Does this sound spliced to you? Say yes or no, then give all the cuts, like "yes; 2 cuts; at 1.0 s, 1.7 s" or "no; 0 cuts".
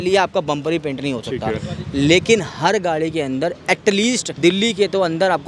no; 0 cuts